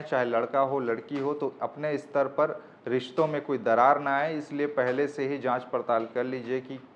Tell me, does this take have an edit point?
no; 0 cuts

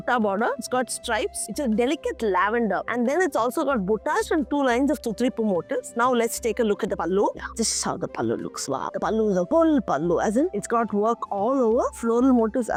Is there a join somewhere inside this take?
no; 0 cuts

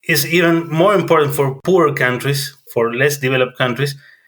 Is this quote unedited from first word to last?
no; 1 cut; at 1.6 s

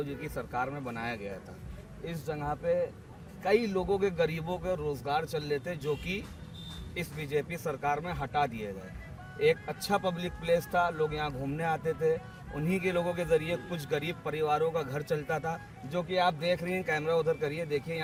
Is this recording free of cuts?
yes; 0 cuts

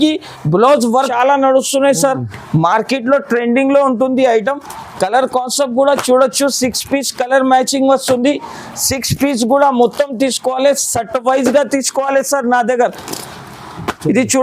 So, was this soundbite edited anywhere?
yes; 1 cut; at 1.1 s

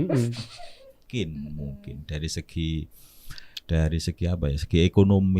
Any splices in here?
yes; 1 cut; at 1.0 s

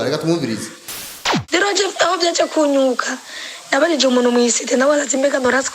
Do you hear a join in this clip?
yes; 1 cut; at 1.0 s

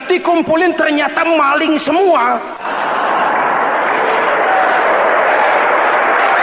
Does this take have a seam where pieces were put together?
yes; 1 cut; at 2.6 s

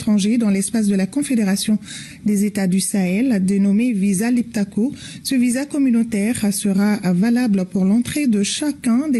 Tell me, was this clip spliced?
no; 0 cuts

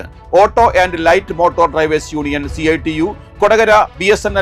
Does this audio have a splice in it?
no; 0 cuts

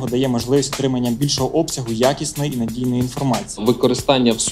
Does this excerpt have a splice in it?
yes; 1 cut; at 3.6 s

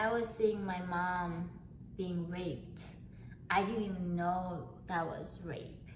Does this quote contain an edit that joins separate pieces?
no; 0 cuts

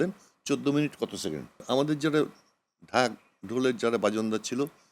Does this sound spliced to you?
yes; 1 cut; at 1.6 s

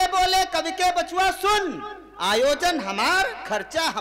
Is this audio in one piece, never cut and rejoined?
yes; 0 cuts

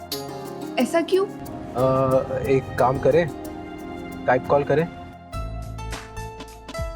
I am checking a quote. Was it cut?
no; 0 cuts

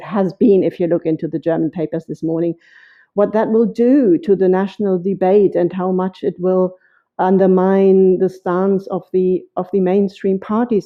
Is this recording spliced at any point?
no; 0 cuts

